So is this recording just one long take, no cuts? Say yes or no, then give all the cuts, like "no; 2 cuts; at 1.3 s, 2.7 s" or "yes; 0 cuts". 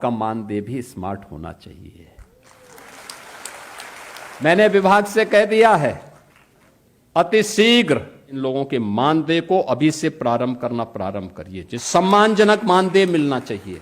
no; 3 cuts; at 4.3 s, 8.3 s, 11.8 s